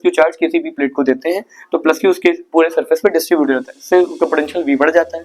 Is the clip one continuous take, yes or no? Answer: yes